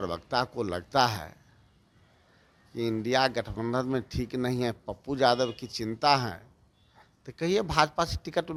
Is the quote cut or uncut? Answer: uncut